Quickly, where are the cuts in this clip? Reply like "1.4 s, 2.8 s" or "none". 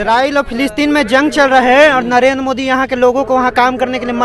none